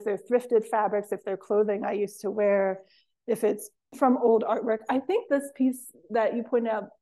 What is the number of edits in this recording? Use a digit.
0